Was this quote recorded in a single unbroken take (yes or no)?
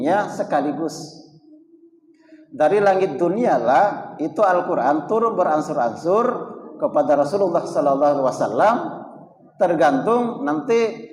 yes